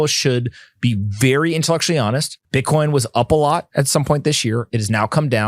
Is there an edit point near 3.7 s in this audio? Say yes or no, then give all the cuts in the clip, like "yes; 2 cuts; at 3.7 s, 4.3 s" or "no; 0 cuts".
no; 1 cut; at 2.3 s